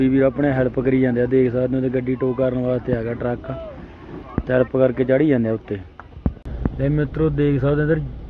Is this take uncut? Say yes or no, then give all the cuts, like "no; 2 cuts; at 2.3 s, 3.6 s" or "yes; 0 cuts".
yes; 0 cuts